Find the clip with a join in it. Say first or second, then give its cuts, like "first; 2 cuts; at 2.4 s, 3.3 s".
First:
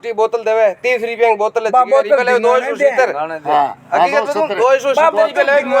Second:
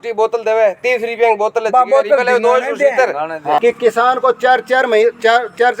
second; 1 cut; at 3.6 s